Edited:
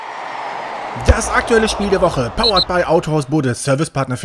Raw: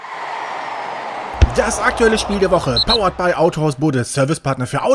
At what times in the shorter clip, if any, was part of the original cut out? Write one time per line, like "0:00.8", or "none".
0:01.1